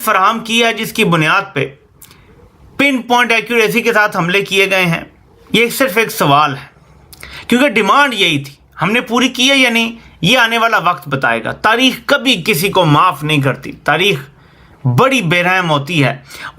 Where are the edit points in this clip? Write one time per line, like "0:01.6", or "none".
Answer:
none